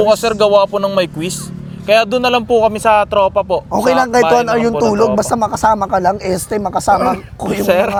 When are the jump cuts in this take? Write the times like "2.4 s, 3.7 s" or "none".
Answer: none